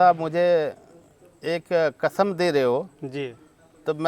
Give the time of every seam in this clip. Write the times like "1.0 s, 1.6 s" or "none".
none

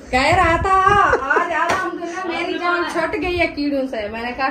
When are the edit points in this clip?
none

